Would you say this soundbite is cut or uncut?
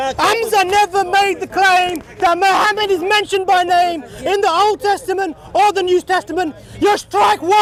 uncut